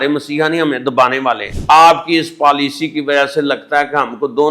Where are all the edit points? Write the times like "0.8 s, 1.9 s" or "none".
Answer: 1.5 s